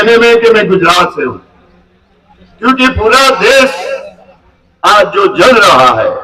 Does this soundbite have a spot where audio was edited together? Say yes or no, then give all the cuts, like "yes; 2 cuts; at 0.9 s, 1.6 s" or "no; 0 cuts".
no; 0 cuts